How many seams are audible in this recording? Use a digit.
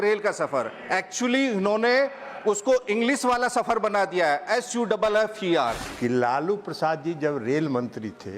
1